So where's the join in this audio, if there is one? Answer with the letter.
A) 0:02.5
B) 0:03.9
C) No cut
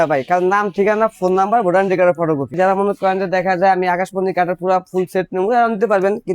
A